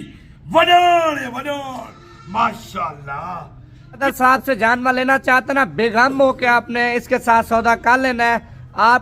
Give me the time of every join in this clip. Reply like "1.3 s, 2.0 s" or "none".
4.0 s